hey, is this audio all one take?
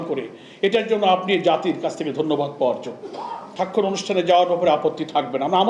no; 1 cut; at 3.5 s

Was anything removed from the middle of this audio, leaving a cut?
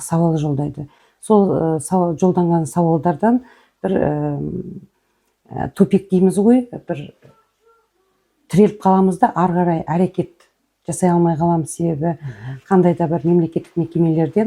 no; 0 cuts

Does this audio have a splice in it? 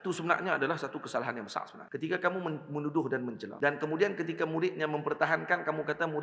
yes; 2 cuts; at 1.8 s, 3.5 s

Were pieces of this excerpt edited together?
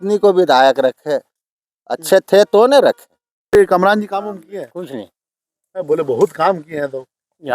yes; 1 cut; at 3.5 s

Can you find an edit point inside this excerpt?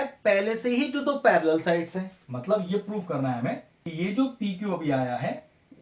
yes; 1 cut; at 3.8 s

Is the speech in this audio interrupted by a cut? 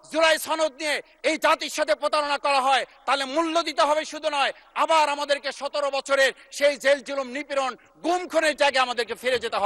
no; 0 cuts

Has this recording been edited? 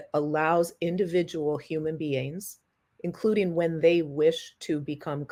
no; 0 cuts

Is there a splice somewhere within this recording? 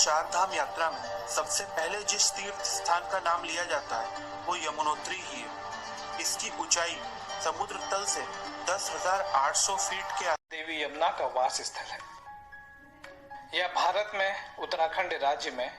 yes; 2 cuts; at 10.6 s, 14.5 s

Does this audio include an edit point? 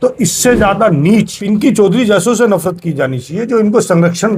yes; 1 cut; at 1.4 s

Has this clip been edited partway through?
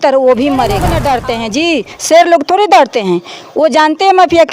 yes; 1 cut; at 0.9 s

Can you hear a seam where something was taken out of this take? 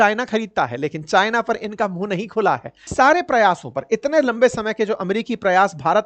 yes; 1 cut; at 2.9 s

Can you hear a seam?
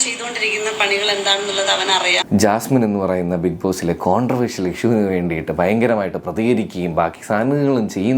yes; 1 cut; at 2.2 s

